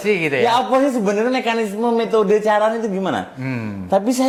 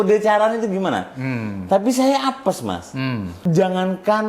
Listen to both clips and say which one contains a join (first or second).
second